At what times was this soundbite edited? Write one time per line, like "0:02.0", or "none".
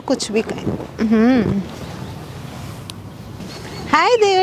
0:03.4